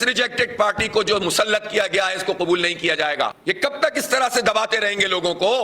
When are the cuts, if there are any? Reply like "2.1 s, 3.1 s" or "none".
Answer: 3.4 s